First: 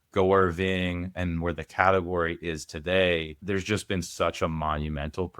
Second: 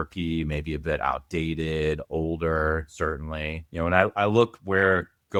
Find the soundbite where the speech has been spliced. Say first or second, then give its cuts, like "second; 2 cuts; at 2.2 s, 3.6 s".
first; 2 cuts; at 1.2 s, 3.4 s